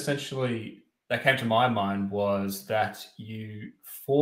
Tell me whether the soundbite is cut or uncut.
uncut